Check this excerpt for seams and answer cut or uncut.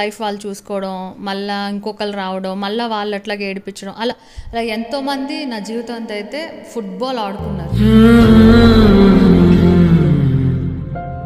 uncut